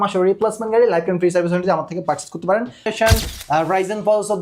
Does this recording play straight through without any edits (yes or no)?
no